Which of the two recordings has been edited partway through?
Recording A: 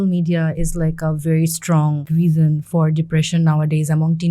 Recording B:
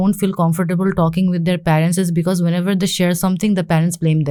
A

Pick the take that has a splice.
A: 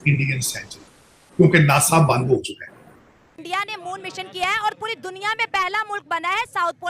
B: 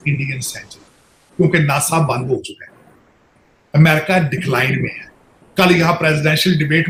A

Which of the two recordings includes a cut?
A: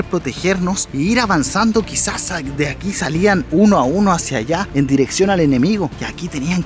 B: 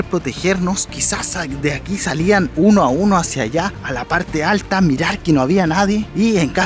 B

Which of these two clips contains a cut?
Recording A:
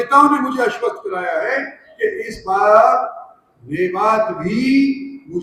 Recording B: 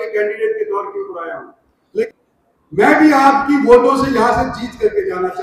B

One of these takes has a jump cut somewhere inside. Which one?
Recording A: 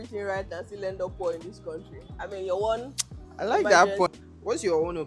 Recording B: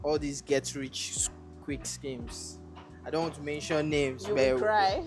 A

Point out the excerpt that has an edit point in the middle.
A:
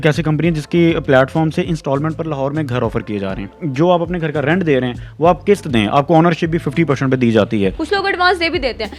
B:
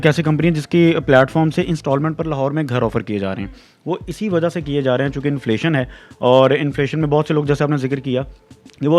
A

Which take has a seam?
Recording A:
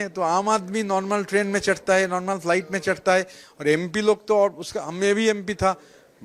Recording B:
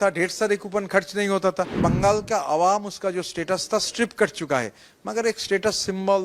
B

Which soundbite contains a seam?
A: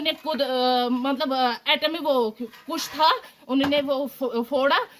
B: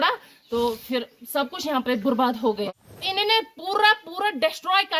B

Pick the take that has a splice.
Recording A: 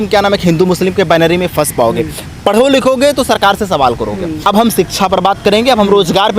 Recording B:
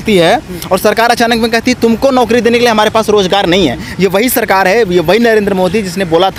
A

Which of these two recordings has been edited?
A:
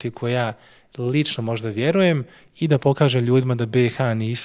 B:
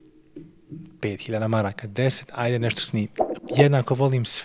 B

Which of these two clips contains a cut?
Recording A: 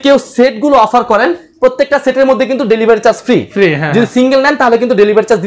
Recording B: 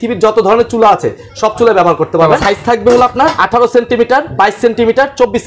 B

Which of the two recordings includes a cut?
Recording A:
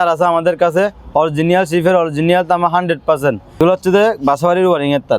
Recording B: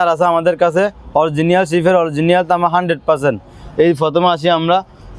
A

